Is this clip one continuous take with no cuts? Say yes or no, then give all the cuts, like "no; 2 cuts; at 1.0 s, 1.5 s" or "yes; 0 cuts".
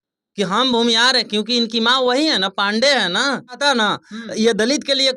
no; 1 cut; at 3.6 s